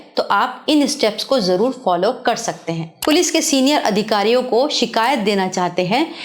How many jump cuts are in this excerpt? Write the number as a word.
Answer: one